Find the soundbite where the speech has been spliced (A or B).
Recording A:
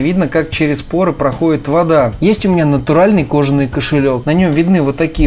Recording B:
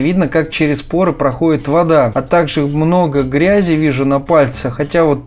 A